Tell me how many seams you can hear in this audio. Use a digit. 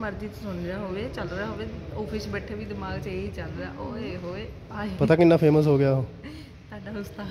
0